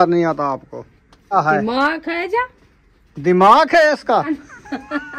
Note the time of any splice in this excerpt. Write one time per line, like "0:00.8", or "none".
0:01.4
0:04.3